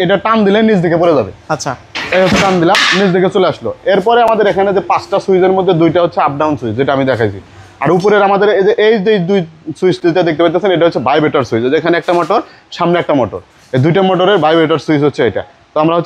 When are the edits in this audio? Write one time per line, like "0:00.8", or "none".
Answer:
none